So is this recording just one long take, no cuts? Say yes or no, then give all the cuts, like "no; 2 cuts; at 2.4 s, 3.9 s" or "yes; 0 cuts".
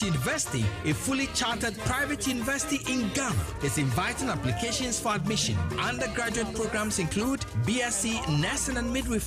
no; 1 cut; at 5.6 s